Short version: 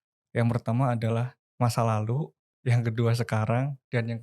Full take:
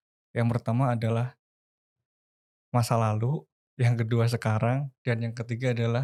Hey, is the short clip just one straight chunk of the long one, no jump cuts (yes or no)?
no